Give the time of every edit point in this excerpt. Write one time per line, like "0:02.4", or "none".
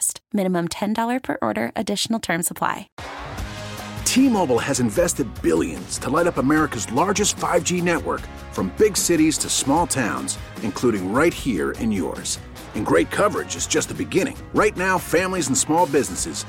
0:02.9

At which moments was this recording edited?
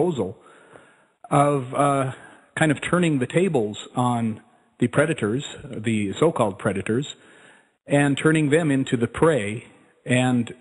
none

